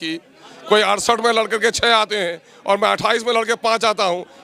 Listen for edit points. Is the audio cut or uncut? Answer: uncut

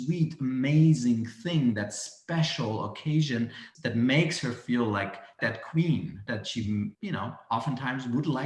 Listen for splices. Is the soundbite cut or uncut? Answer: cut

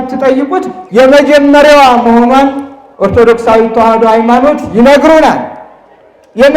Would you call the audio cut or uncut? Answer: uncut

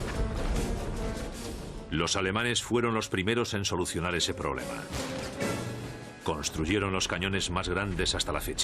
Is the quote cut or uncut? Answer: cut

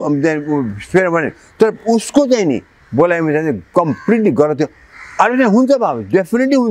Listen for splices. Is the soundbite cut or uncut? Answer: uncut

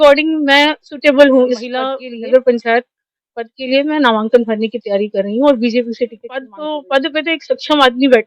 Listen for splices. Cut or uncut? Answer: cut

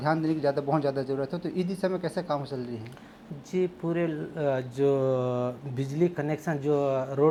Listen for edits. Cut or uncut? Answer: uncut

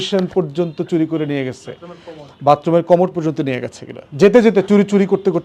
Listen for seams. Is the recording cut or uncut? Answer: uncut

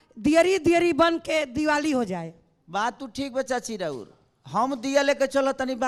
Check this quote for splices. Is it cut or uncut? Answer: uncut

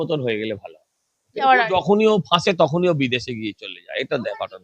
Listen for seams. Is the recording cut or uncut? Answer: cut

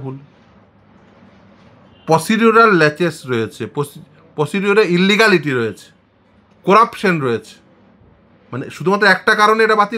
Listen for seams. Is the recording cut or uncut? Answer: uncut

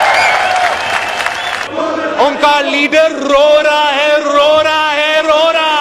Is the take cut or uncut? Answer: cut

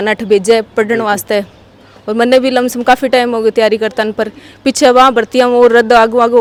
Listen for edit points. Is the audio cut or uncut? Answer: uncut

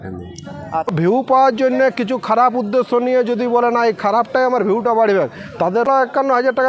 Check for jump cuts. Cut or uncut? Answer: cut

